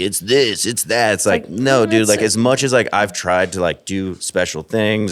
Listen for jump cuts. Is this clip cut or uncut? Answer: uncut